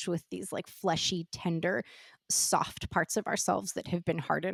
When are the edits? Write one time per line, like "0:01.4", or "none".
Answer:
none